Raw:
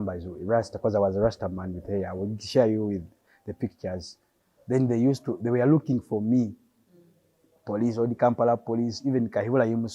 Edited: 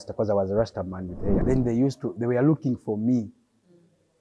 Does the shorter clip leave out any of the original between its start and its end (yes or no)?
yes